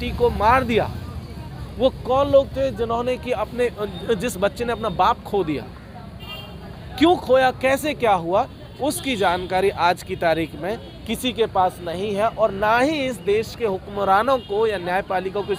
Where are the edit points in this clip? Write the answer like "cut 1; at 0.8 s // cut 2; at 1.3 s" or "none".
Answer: none